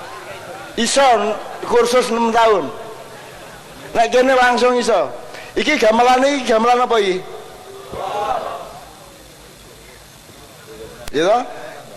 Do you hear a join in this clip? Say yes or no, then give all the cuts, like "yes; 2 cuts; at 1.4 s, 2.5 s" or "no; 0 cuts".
no; 0 cuts